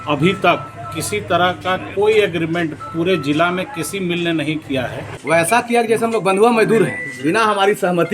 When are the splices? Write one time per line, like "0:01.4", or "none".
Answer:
0:05.1